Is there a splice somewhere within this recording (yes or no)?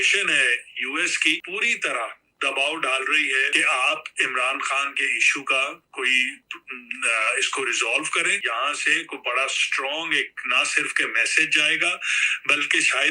yes